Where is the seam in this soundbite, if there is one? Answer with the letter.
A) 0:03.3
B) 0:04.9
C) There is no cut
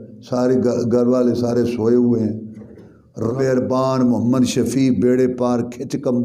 A